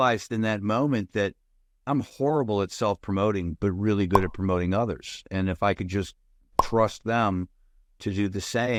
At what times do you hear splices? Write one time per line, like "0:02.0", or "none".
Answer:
none